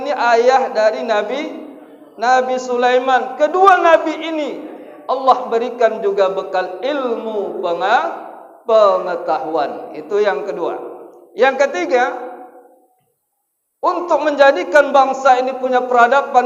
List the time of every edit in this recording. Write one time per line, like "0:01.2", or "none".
none